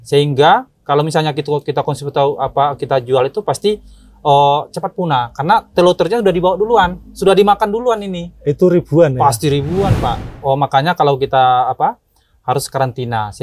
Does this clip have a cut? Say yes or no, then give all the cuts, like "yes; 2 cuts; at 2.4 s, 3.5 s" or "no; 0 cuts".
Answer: yes; 1 cut; at 10.3 s